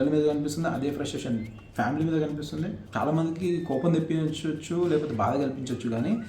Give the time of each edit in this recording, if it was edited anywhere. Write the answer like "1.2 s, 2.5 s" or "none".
2.8 s